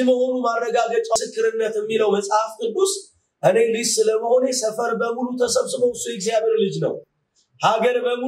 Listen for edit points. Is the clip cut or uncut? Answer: cut